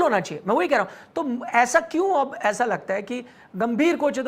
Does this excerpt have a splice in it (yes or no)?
yes